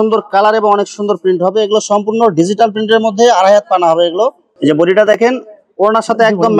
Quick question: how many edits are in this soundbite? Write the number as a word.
one